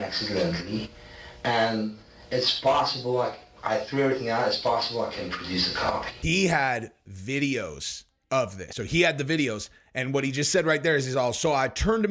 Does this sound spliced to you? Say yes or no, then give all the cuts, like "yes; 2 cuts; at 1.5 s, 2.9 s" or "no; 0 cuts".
yes; 2 cuts; at 6.1 s, 8.7 s